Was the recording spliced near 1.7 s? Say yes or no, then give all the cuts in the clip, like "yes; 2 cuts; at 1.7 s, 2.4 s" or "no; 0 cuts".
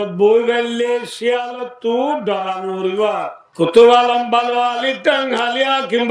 no; 1 cut; at 3.4 s